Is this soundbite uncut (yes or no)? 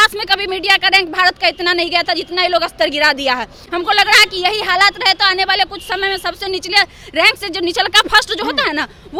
yes